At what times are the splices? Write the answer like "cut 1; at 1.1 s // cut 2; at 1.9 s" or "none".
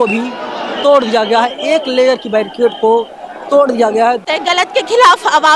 cut 1; at 4.2 s